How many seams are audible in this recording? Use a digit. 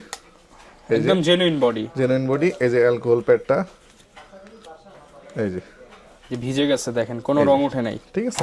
0